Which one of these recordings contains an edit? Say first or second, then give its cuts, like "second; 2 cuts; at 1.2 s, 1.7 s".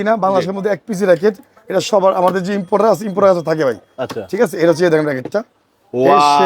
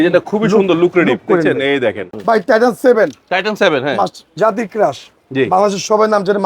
second; 1 cut; at 2.1 s